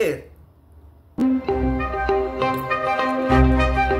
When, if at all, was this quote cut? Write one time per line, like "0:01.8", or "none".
0:01.2